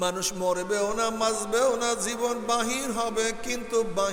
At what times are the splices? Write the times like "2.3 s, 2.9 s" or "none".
none